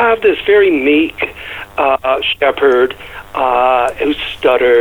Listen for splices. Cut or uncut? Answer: uncut